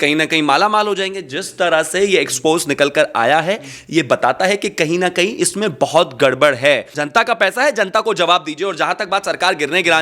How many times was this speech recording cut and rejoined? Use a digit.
1